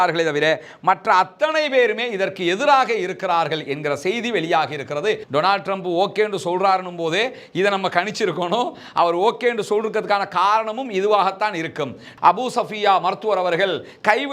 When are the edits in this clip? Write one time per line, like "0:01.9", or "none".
0:05.2
0:12.0